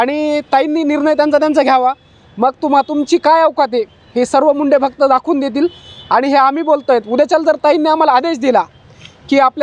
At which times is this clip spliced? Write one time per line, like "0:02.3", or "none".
none